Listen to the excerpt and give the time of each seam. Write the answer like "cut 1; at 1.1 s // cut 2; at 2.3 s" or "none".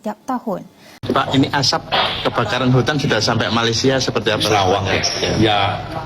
cut 1; at 0.9 s